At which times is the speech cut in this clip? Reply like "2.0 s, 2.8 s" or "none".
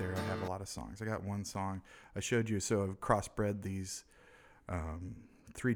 2.9 s